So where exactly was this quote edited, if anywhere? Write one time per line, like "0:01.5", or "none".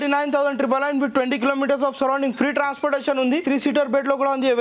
0:03.4

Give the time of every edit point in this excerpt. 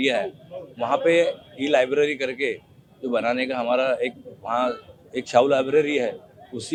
none

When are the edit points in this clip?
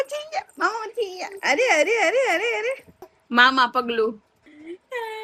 none

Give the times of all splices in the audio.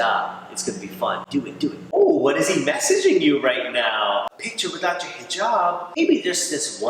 0:01.9
0:04.2
0:06.0

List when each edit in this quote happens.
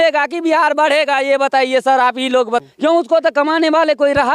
0:02.7

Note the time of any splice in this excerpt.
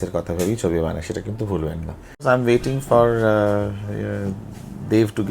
0:02.2

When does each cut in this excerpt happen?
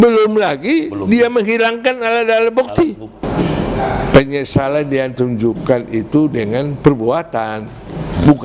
0:03.2

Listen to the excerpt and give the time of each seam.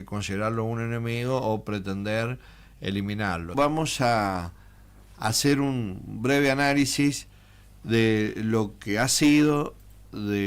0:03.5

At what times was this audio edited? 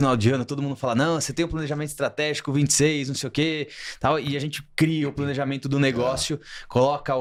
none

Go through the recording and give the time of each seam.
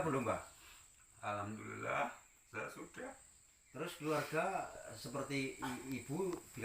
none

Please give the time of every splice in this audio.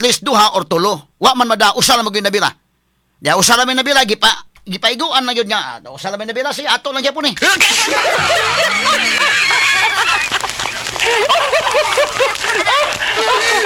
none

